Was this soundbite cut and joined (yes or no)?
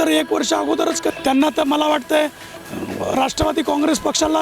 yes